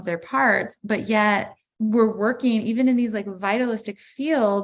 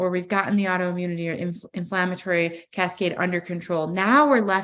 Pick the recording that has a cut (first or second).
first